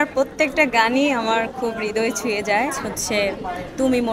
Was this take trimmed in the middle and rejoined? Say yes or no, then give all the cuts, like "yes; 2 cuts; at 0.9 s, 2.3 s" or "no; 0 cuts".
yes; 1 cut; at 2.9 s